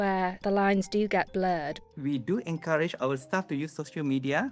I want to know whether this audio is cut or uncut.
cut